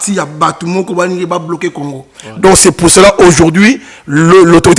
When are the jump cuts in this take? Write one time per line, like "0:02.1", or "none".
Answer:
none